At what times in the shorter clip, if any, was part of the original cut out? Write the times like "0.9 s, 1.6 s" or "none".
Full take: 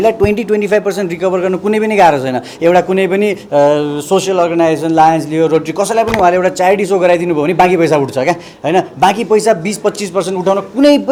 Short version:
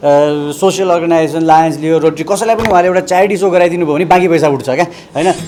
none

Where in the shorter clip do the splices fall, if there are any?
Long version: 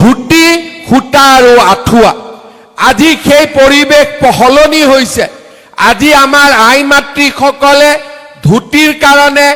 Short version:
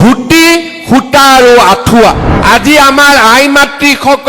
2.3 s

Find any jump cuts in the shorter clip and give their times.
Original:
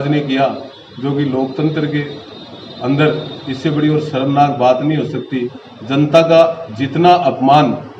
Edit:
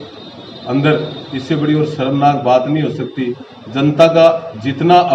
none

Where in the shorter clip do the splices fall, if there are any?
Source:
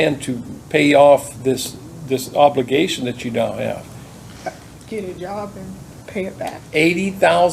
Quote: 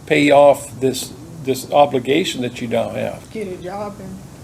3.2 s

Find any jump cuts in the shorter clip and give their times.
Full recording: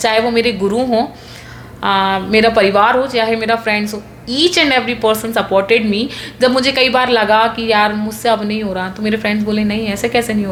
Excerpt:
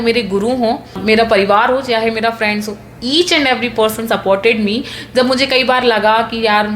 1.0 s

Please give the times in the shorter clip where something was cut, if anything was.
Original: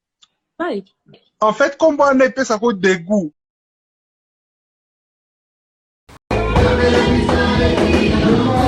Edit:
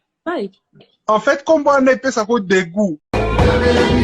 3.0 s

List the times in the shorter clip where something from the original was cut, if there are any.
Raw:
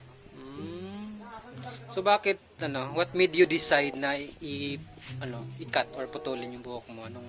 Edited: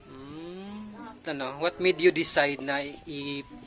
1.2 s

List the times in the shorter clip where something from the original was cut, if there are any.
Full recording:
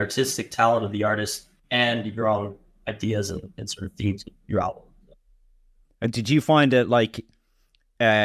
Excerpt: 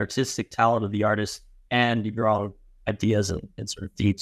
none

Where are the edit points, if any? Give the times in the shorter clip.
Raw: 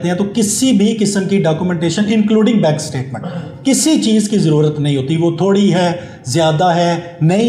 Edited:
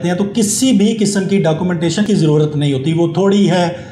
2.1 s

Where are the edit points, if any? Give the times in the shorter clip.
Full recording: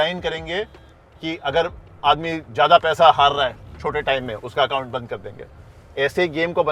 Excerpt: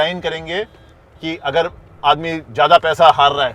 none

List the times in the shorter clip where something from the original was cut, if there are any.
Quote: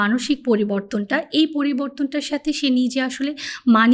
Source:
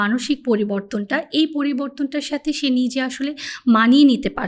none

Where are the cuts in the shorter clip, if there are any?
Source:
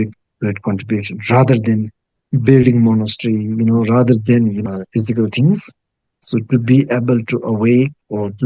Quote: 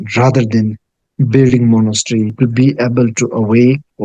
2.3 s

